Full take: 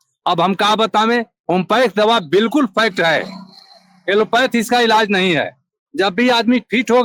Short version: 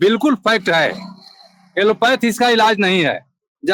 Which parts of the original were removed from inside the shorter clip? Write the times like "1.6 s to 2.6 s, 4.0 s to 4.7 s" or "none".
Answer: none